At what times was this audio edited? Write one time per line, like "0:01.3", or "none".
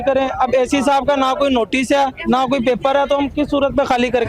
none